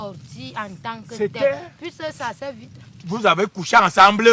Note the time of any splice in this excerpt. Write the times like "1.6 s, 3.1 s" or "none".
none